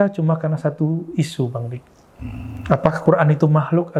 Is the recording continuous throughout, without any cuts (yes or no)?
yes